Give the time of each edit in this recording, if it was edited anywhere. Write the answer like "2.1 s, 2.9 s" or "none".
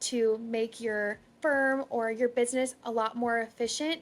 1.2 s